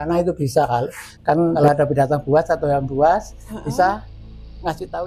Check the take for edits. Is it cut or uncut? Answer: cut